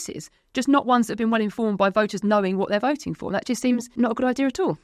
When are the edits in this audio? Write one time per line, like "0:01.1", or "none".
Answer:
0:03.9